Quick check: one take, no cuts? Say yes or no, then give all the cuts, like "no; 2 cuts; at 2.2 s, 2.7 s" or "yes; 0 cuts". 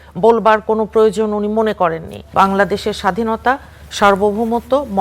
no; 1 cut; at 2.3 s